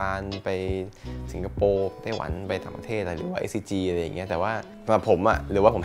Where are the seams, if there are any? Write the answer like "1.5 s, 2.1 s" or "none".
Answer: 4.7 s

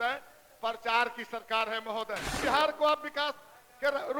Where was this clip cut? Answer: 2.4 s

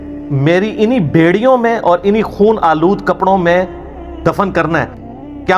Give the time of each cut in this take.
none

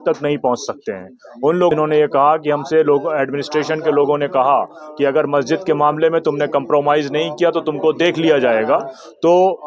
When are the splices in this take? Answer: 1.7 s

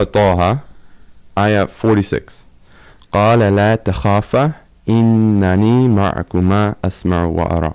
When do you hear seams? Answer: none

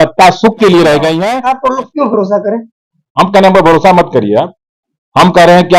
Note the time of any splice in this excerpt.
1.3 s

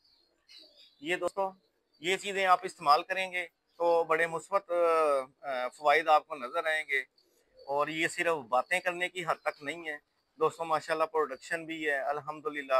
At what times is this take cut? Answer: 1.3 s

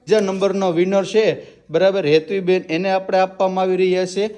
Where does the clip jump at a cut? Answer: none

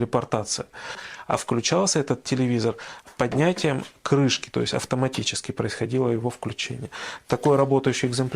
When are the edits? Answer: 1.1 s

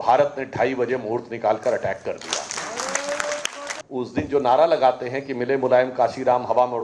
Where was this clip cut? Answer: 3.7 s

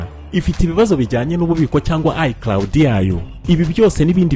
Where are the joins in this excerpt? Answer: none

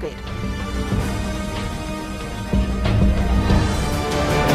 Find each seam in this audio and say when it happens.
none

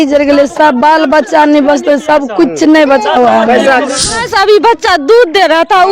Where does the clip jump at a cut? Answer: 4.1 s

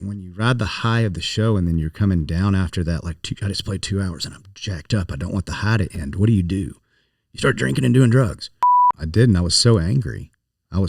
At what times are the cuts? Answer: 8.9 s

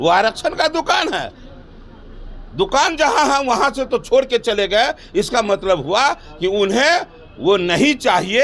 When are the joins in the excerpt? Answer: none

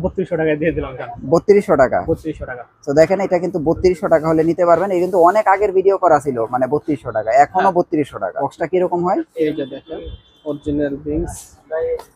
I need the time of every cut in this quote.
8.5 s

